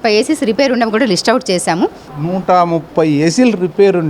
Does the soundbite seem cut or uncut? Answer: cut